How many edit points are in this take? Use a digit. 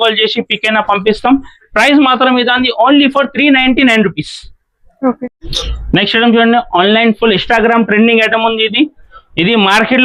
0